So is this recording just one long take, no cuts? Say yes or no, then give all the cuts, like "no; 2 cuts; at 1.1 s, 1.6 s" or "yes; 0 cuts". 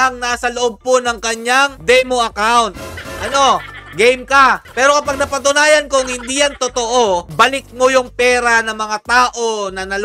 yes; 0 cuts